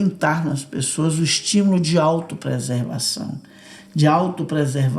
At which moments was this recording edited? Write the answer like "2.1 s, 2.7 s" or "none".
none